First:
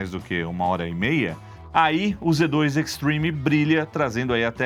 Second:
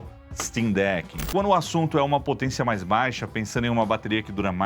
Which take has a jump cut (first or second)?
second